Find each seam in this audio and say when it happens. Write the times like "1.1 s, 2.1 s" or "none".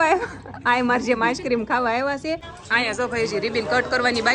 2.6 s